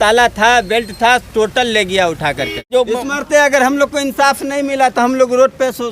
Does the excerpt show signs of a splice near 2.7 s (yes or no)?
yes